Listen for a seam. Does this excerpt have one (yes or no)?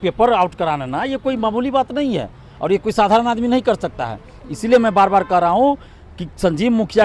no